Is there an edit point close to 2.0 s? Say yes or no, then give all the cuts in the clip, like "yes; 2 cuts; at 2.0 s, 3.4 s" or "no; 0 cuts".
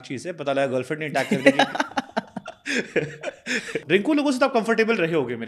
no; 1 cut; at 3.8 s